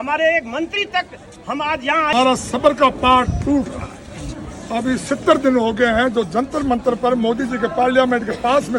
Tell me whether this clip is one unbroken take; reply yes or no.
no